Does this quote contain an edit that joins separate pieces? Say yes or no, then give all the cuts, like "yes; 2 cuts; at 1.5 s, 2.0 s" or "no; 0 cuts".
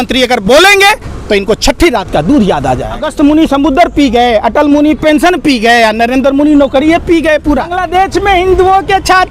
yes; 2 cuts; at 3.0 s, 7.8 s